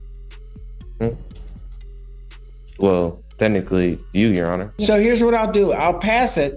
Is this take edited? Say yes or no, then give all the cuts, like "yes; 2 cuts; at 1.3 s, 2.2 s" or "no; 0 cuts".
yes; 1 cut; at 4.8 s